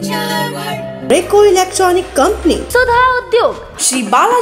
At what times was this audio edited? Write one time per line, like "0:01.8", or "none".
0:01.0